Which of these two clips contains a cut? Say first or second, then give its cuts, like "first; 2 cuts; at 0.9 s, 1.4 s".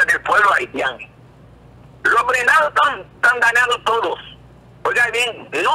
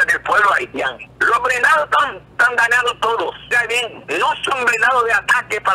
second; 2 cuts; at 1.1 s, 3.5 s